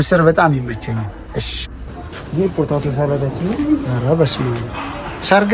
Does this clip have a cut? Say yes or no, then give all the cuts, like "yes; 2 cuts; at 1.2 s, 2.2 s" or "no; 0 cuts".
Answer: yes; 1 cut; at 1.9 s